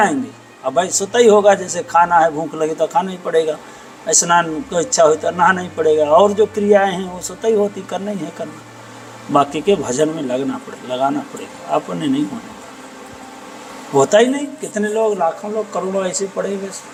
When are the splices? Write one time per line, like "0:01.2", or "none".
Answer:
none